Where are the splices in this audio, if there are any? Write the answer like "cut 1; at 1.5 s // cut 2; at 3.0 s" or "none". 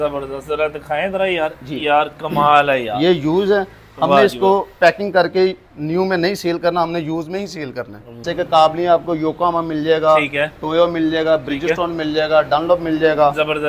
cut 1; at 8.3 s